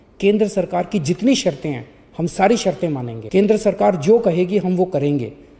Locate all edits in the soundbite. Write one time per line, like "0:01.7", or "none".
0:03.1